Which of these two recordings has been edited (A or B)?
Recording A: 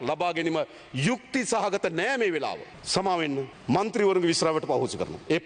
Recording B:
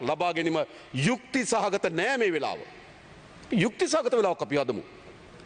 A